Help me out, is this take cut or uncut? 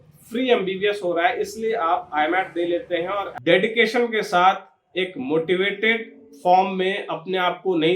cut